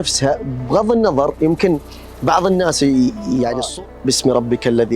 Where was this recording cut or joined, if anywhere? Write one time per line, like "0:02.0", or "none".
0:03.7